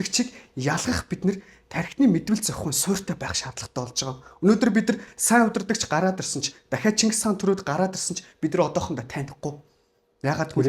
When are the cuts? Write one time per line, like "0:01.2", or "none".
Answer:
none